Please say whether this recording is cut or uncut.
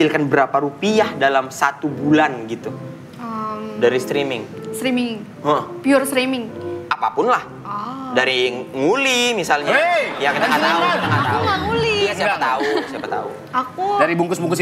uncut